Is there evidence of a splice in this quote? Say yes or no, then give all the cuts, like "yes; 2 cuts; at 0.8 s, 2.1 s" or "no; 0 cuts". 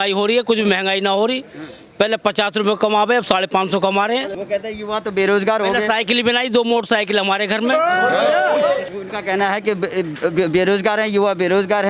yes; 2 cuts; at 4.3 s, 8.9 s